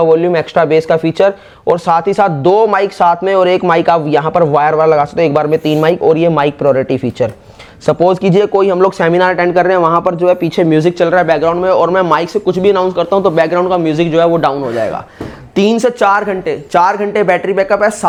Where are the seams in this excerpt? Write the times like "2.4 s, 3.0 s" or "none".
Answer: none